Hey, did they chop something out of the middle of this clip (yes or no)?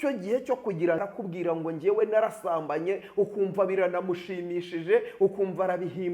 yes